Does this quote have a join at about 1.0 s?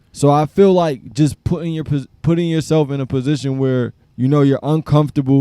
no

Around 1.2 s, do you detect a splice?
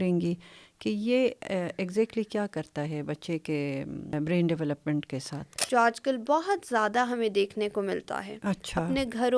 no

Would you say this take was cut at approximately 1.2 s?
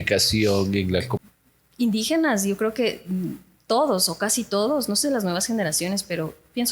yes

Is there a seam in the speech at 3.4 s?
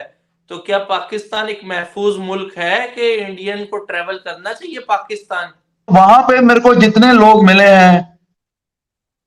no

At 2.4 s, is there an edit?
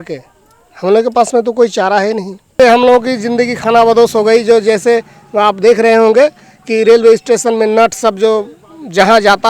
yes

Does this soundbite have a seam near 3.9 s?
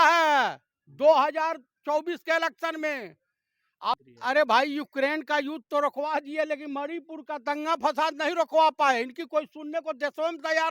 yes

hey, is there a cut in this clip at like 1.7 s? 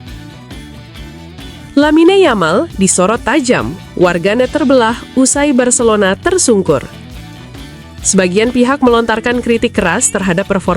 yes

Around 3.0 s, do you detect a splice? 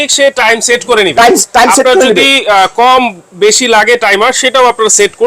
no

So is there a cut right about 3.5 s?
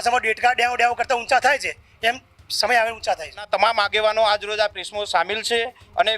yes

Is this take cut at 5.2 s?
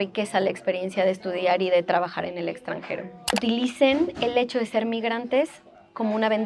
no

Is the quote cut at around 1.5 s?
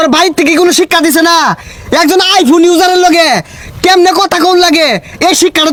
no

